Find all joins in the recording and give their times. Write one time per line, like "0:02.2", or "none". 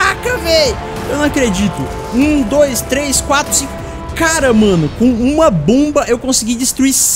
none